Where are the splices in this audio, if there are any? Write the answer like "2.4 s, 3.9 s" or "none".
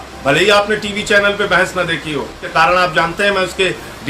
2.5 s